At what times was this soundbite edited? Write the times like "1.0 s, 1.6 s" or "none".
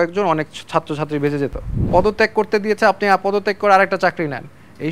1.7 s